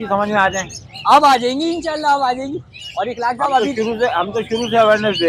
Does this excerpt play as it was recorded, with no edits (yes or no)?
yes